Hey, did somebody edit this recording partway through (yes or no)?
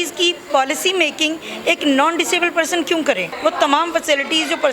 yes